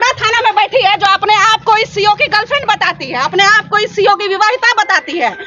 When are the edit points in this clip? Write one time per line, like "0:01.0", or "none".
none